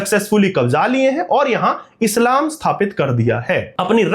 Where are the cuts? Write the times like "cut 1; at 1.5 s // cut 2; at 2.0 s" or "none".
none